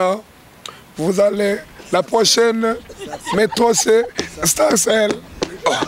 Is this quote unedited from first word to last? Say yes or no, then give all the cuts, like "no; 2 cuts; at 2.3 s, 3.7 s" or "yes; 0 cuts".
yes; 0 cuts